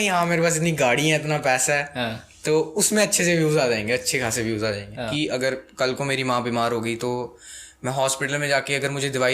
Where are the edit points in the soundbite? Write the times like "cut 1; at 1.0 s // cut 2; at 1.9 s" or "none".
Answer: cut 1; at 5.1 s